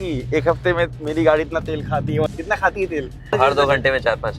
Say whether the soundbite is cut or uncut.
cut